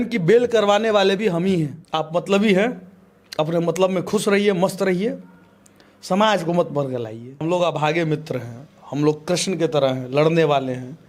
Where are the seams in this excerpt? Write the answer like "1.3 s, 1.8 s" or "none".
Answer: 1.8 s, 7.4 s